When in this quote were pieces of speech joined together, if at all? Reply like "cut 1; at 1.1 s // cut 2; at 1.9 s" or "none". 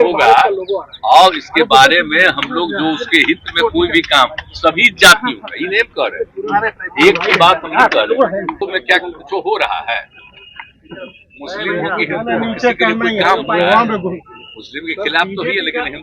cut 1; at 8.6 s